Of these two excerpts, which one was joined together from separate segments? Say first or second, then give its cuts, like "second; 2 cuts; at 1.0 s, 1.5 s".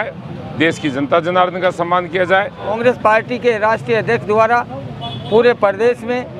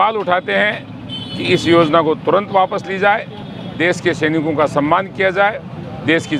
first; 1 cut; at 2.8 s